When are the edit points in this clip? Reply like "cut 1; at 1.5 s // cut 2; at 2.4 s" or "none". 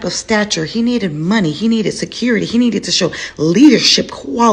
none